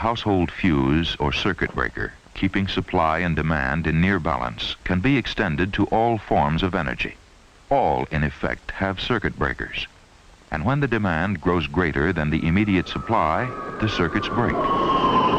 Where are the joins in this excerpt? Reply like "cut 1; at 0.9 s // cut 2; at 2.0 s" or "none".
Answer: none